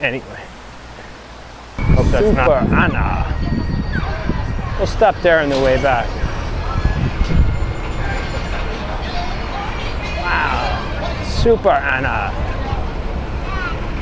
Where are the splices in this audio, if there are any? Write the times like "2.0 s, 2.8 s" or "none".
2.0 s